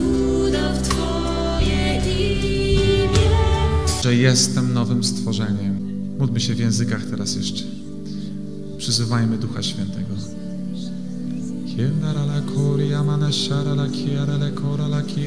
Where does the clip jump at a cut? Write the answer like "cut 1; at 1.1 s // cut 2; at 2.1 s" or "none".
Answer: none